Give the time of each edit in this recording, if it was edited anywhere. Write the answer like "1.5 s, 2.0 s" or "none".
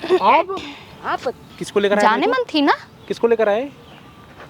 1.5 s